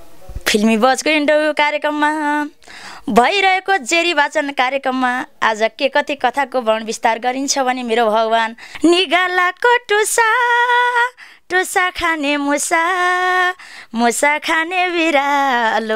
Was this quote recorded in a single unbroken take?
no; 1 cut; at 8.6 s

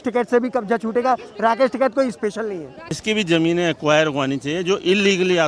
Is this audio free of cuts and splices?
no; 1 cut; at 3.0 s

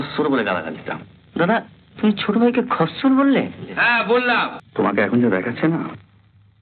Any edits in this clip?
yes; 1 cut; at 4.6 s

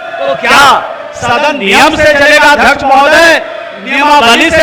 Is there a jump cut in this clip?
no; 0 cuts

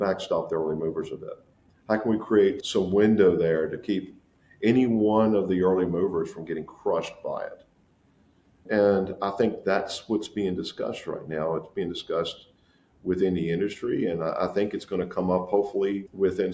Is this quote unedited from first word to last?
yes; 0 cuts

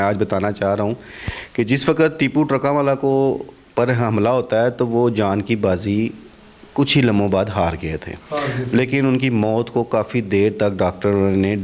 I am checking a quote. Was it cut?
no; 0 cuts

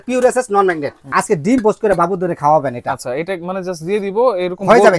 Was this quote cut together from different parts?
yes; 1 cut; at 0.9 s

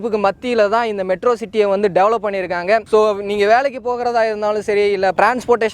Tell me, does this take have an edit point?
no; 0 cuts

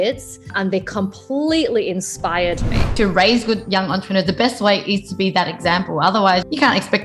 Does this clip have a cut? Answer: yes; 1 cut; at 2.9 s

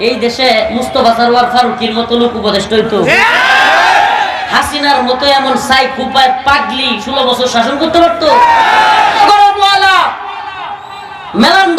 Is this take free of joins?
no; 1 cut; at 9.2 s

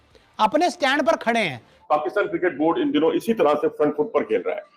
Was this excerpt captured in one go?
no; 1 cut; at 1.7 s

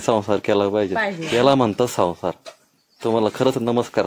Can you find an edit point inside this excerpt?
no; 0 cuts

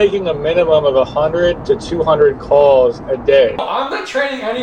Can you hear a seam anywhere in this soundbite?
yes; 1 cut; at 3.6 s

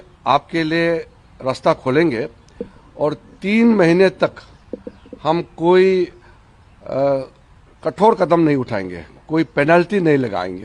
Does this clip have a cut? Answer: no; 0 cuts

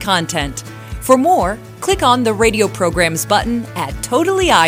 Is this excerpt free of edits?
yes; 0 cuts

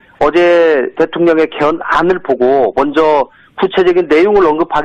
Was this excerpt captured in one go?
no; 1 cut; at 2.0 s

